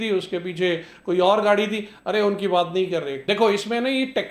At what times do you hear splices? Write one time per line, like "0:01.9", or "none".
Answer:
0:03.1